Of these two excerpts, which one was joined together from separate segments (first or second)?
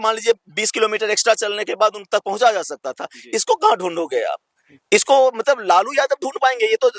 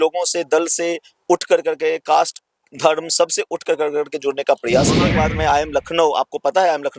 second